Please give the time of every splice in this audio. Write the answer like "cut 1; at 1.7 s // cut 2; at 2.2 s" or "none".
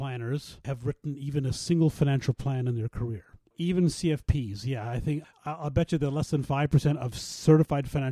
cut 1; at 3.5 s // cut 2; at 5.2 s